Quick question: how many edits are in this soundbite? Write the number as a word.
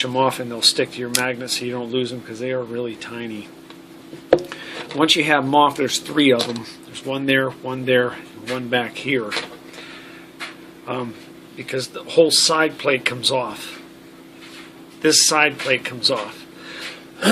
one